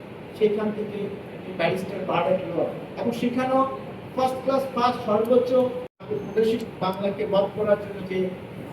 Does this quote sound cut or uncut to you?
cut